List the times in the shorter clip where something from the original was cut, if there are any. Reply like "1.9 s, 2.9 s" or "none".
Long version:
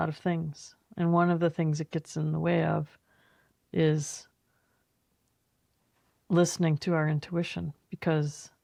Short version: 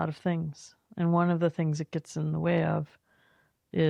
none